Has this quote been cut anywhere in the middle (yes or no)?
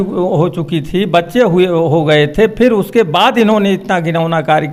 no